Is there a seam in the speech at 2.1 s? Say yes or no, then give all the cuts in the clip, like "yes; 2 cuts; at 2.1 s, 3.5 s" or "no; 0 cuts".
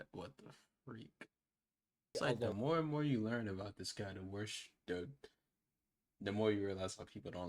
yes; 1 cut; at 2.1 s